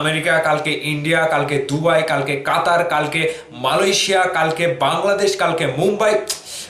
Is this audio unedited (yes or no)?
yes